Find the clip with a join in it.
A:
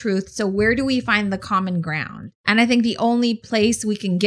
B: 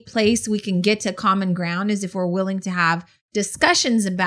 A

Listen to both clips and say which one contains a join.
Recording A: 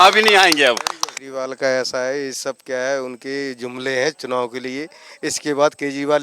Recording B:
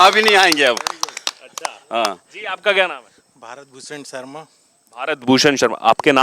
A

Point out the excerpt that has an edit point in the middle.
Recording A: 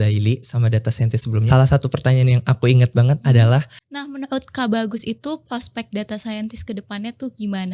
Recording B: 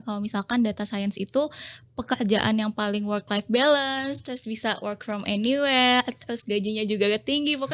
A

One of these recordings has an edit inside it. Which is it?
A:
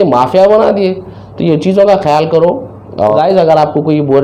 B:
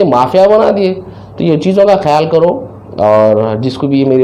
A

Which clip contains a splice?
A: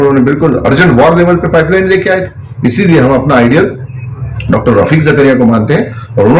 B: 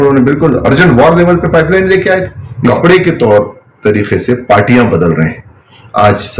B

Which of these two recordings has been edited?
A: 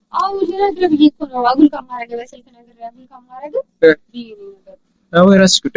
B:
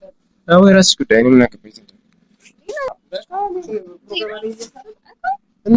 B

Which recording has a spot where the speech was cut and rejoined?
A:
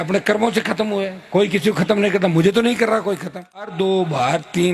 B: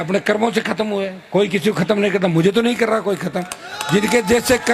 A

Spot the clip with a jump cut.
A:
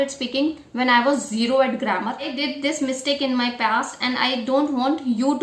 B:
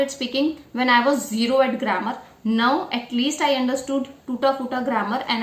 A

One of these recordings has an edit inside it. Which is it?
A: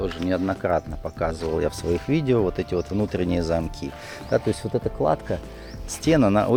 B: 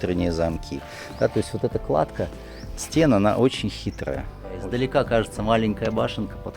B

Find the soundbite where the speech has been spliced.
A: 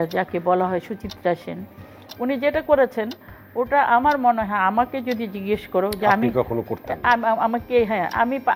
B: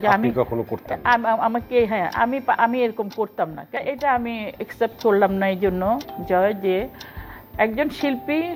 B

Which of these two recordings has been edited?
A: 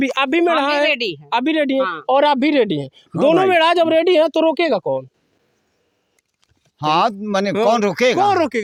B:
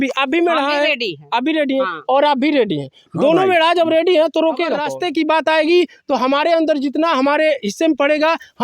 B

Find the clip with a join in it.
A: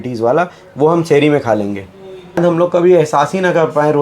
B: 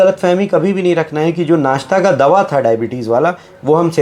A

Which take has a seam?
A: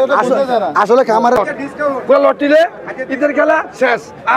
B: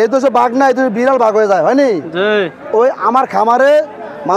A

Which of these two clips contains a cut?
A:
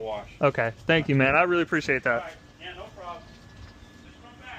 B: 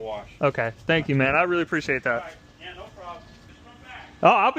B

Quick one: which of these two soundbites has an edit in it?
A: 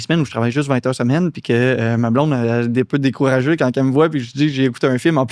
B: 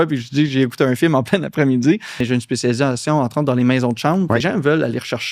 B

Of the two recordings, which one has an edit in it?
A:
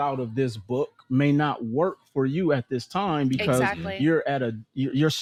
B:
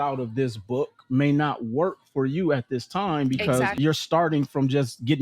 B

